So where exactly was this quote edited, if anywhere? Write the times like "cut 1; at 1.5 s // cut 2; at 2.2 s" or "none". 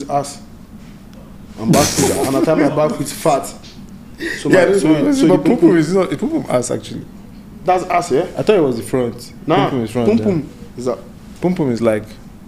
none